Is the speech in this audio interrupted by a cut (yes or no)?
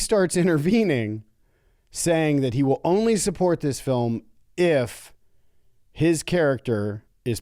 no